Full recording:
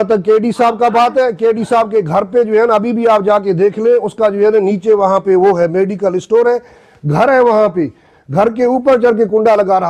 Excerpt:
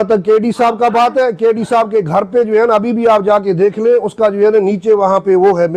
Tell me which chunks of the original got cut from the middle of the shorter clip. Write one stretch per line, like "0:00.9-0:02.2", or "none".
none